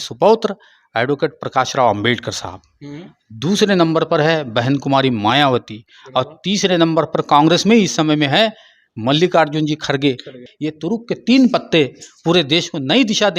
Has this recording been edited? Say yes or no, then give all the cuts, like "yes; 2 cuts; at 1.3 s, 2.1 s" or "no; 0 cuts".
yes; 1 cut; at 10.4 s